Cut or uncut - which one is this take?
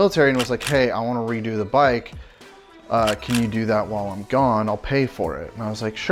uncut